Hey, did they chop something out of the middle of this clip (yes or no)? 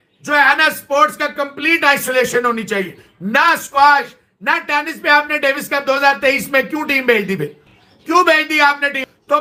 no